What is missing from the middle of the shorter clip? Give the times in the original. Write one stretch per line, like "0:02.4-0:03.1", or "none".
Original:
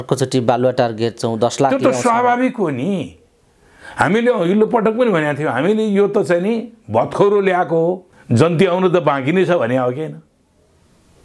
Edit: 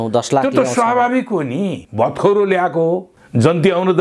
0:03.1-0:06.8